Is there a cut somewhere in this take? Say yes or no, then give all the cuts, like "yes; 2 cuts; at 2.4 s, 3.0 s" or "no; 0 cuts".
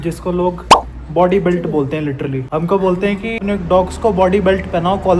yes; 2 cuts; at 2.4 s, 3.4 s